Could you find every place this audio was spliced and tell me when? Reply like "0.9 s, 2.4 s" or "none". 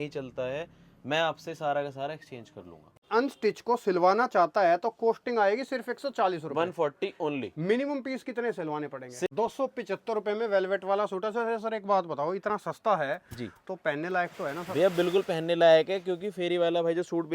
3.0 s, 9.3 s